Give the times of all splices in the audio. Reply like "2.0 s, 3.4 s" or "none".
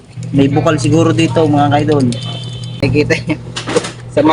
2.8 s